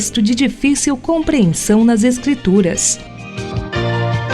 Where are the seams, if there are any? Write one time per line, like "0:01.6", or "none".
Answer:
0:02.9